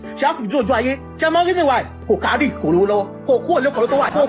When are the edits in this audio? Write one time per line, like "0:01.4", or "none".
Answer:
0:01.1
0:01.9
0:03.1